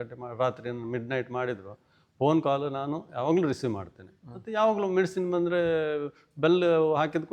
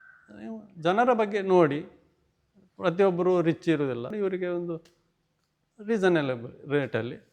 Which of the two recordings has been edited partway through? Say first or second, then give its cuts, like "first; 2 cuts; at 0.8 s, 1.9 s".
second; 1 cut; at 4.1 s